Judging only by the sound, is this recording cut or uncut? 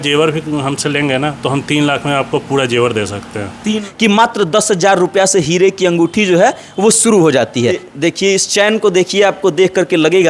cut